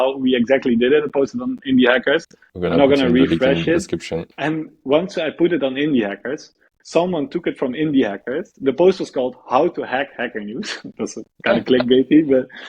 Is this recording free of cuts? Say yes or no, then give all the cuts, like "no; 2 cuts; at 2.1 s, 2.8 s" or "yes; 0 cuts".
no; 1 cut; at 4.3 s